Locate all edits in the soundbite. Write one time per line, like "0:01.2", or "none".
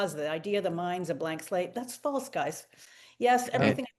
none